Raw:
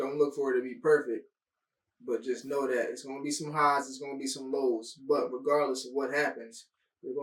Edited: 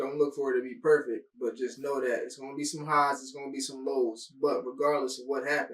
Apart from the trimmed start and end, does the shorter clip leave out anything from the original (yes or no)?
yes